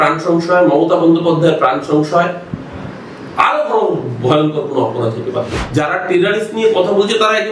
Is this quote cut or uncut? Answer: cut